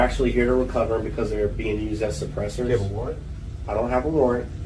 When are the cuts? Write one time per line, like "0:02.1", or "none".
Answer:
none